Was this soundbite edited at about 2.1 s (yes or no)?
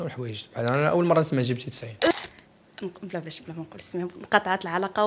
yes